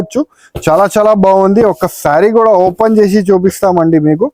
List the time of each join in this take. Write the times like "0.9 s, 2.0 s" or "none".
none

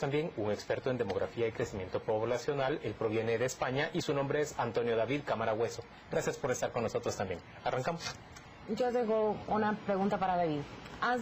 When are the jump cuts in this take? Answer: 4.1 s

